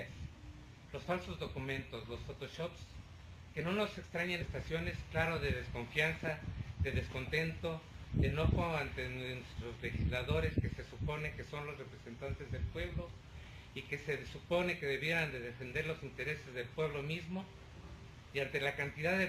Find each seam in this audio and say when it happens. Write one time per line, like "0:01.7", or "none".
none